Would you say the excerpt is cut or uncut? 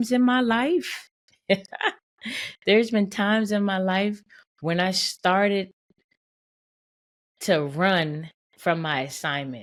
uncut